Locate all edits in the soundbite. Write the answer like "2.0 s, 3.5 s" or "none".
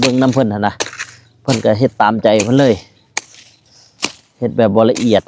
none